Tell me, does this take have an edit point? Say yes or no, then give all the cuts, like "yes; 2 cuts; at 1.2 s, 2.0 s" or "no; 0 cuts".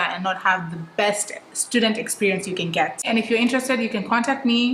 yes; 1 cut; at 3.0 s